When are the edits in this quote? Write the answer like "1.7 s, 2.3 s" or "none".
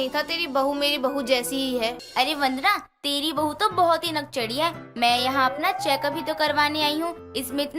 2.0 s